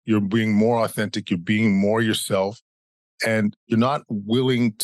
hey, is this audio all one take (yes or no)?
yes